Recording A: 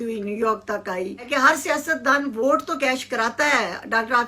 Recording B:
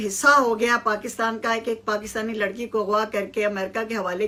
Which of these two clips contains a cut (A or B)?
A